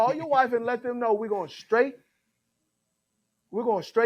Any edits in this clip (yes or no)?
no